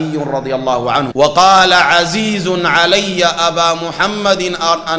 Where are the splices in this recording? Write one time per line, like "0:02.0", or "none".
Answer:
0:01.1